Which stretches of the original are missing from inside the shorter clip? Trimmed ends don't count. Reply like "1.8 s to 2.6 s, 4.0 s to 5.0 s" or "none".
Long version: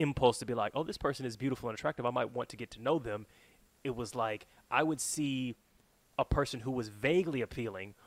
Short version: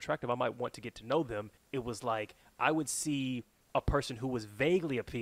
3.3 s to 3.7 s, 5.7 s to 6.0 s